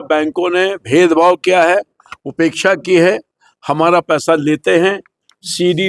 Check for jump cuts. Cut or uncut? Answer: uncut